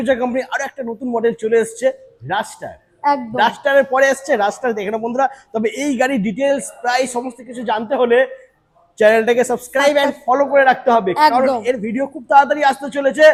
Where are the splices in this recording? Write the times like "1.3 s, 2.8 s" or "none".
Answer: none